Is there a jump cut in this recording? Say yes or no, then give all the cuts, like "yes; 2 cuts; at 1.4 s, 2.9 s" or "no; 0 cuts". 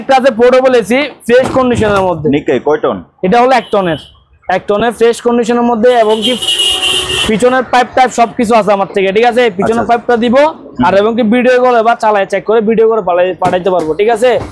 no; 0 cuts